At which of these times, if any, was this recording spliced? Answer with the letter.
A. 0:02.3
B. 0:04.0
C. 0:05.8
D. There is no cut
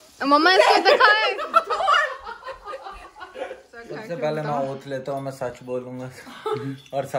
B